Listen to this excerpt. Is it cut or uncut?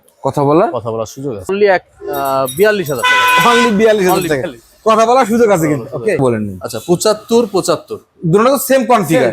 cut